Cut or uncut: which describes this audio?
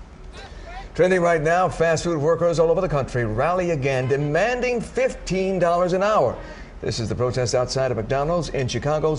uncut